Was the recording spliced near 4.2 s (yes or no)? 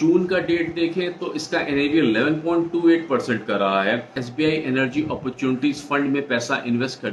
yes